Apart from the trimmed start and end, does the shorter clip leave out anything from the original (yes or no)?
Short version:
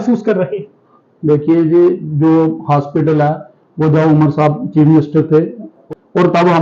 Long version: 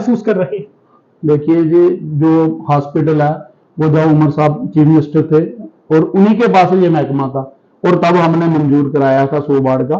yes